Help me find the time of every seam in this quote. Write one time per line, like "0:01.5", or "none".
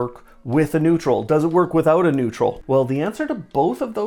0:02.6